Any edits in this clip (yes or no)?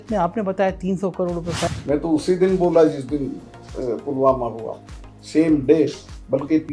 yes